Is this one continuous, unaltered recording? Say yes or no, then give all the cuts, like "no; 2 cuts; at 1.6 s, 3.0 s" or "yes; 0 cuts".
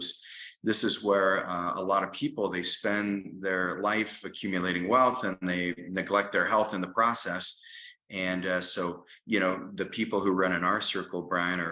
yes; 0 cuts